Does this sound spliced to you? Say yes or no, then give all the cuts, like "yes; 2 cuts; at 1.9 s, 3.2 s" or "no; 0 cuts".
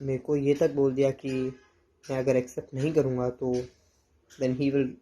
no; 0 cuts